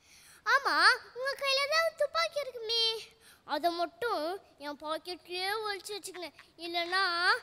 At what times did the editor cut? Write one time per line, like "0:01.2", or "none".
none